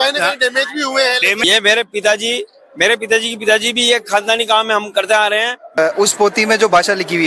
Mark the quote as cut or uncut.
cut